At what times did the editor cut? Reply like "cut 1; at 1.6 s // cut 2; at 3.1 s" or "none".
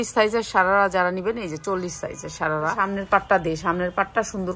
cut 1; at 2.8 s